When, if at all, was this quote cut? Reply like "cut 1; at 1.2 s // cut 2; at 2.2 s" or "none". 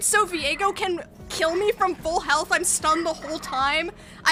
none